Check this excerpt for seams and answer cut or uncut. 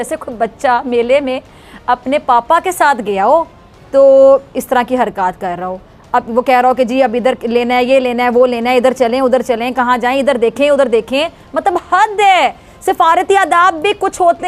uncut